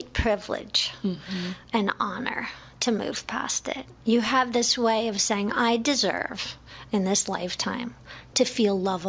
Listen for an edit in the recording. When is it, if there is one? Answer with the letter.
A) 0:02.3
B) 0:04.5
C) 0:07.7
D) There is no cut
D